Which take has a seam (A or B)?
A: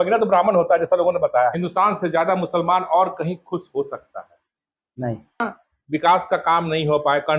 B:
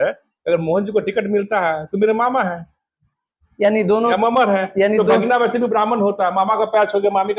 A